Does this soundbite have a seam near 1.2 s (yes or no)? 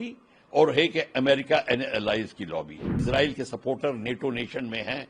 no